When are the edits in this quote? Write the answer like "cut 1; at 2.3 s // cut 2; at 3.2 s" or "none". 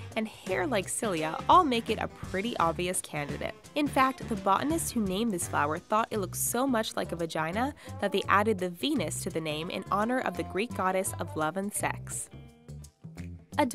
none